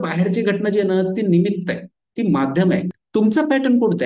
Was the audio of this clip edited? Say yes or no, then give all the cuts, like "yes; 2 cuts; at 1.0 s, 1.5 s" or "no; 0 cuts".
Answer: yes; 1 cut; at 3.0 s